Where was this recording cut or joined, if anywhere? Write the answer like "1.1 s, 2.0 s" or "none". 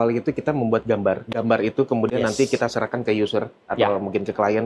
1.2 s